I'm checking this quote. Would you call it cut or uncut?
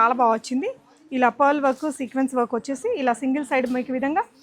uncut